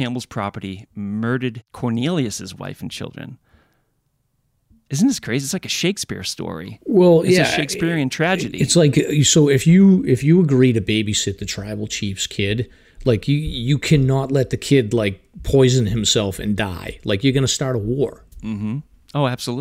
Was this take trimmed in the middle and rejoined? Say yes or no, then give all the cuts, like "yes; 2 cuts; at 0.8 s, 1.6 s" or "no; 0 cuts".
no; 0 cuts